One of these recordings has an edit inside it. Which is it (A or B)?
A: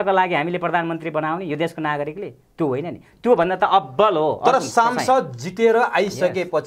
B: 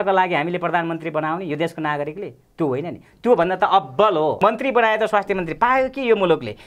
B